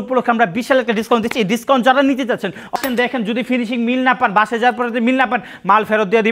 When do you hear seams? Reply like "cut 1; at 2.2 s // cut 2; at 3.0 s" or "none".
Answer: cut 1; at 2.7 s

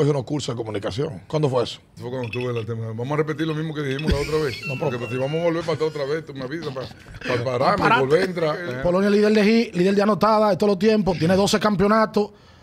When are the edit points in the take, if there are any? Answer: cut 1; at 1.2 s // cut 2; at 1.9 s // cut 3; at 8.7 s

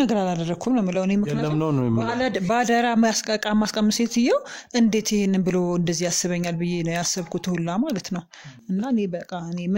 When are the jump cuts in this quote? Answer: none

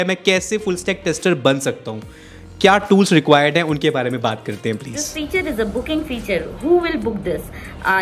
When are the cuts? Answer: cut 1; at 4.9 s

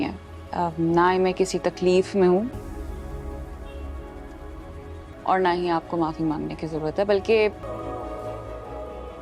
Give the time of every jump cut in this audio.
none

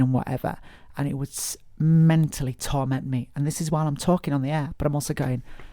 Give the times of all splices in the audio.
cut 1; at 4.7 s

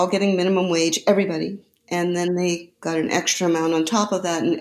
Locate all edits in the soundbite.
none

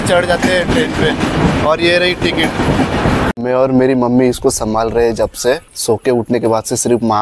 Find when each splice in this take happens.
cut 1; at 3.3 s // cut 2; at 5.7 s

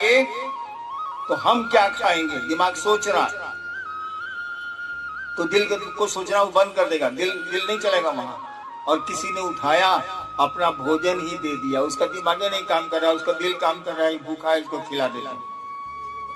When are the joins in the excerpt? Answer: cut 1; at 15.3 s

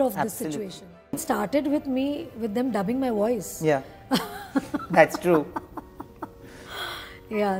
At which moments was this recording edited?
cut 1; at 1.2 s

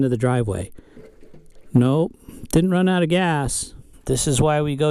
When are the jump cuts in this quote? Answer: cut 1; at 1.4 s // cut 2; at 3.9 s

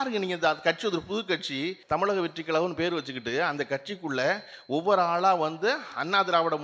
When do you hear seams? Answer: cut 1; at 1.8 s

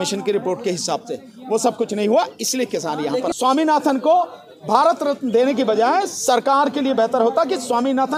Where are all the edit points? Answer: cut 1; at 3.3 s

